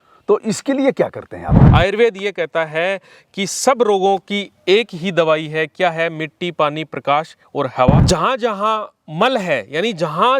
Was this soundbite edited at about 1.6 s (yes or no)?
yes